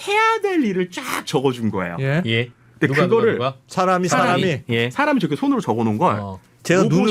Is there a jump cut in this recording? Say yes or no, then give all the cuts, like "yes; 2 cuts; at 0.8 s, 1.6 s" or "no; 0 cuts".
no; 0 cuts